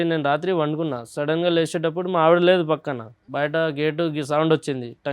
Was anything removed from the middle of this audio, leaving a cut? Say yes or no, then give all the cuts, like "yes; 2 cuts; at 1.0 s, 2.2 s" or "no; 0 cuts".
yes; 1 cut; at 3.2 s